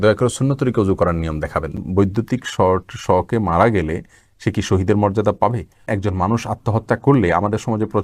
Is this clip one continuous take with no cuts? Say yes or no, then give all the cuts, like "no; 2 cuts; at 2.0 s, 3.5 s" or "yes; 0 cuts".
no; 2 cuts; at 1.8 s, 5.9 s